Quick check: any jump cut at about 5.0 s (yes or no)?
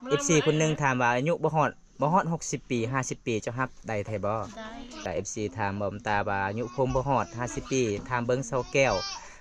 yes